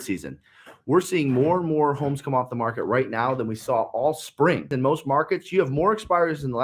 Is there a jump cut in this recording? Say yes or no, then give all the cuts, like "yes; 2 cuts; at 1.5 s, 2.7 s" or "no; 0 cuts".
yes; 1 cut; at 4.7 s